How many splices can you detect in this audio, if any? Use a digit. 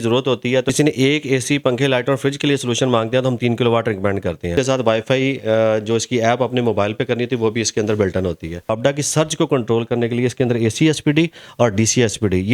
3